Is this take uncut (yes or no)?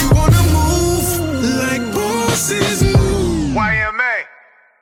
yes